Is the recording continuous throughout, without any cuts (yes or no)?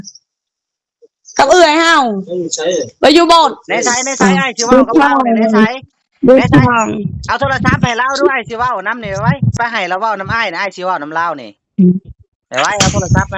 no